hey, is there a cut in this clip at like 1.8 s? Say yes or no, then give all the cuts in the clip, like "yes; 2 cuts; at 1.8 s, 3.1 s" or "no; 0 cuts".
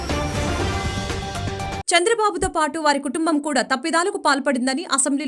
yes; 1 cut; at 1.8 s